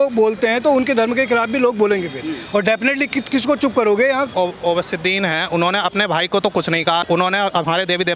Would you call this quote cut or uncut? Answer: cut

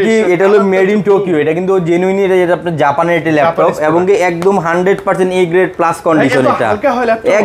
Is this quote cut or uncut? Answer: uncut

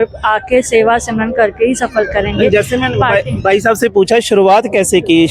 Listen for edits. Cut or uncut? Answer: uncut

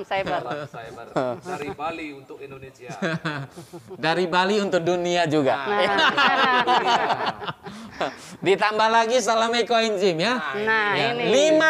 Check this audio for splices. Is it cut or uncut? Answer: uncut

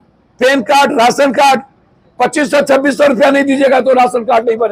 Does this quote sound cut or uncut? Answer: uncut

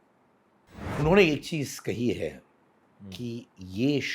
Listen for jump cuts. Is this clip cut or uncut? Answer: cut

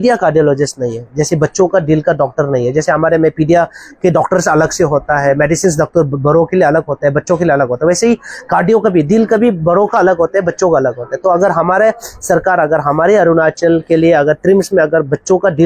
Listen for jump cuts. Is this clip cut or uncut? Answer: uncut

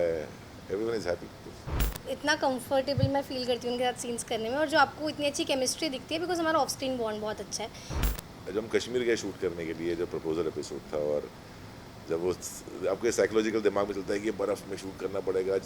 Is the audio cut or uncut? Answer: cut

